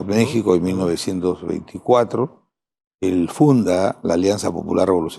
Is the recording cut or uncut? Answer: uncut